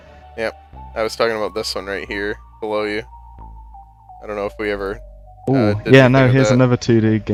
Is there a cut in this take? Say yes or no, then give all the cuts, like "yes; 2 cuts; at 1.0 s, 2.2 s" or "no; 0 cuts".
no; 0 cuts